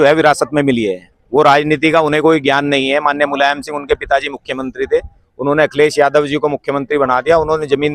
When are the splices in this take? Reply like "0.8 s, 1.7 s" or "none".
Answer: none